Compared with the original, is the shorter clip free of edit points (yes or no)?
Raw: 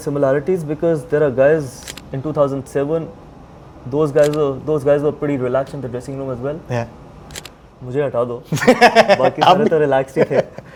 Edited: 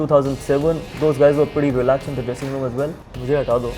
no